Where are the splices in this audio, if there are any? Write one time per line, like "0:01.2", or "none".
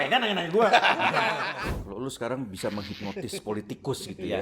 0:01.5